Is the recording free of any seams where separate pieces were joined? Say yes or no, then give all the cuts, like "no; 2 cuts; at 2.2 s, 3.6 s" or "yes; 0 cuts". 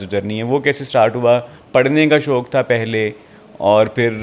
yes; 0 cuts